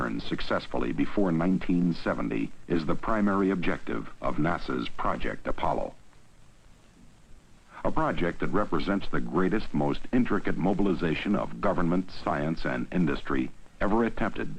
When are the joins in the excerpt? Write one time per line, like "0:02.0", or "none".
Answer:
none